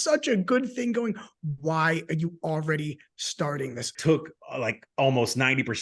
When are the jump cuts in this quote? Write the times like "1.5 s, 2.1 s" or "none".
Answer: 3.9 s